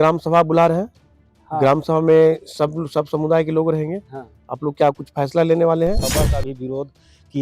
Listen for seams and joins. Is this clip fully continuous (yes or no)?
no